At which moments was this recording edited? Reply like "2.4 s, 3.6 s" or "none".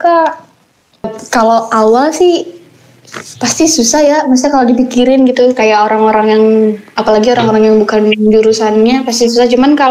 1.2 s